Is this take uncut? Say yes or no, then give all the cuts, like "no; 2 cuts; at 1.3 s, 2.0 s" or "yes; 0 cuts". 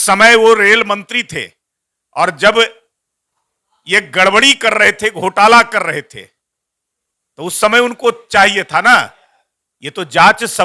yes; 0 cuts